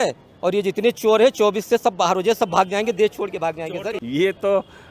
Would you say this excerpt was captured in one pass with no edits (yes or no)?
no